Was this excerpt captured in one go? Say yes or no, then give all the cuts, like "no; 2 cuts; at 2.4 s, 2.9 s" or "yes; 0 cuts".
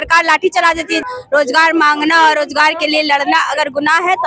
no; 1 cut; at 1.0 s